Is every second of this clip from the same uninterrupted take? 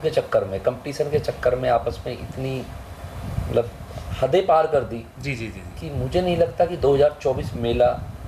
yes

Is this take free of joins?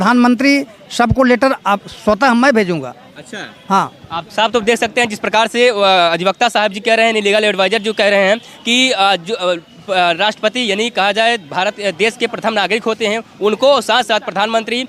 yes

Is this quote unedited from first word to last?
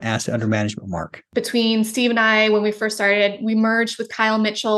no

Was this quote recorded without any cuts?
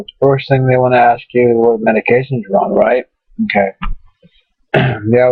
no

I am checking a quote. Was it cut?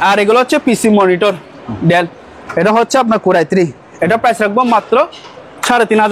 no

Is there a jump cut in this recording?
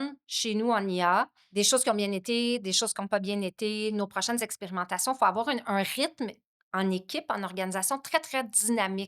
yes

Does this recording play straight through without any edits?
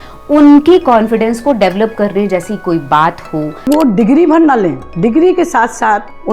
no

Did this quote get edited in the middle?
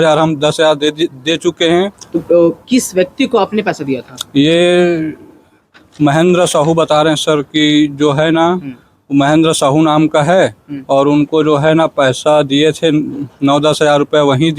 yes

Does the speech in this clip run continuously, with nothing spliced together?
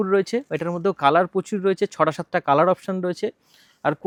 yes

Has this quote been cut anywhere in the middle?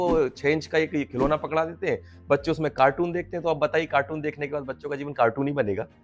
no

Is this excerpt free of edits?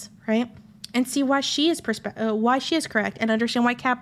yes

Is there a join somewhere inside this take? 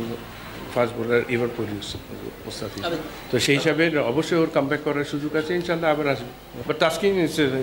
yes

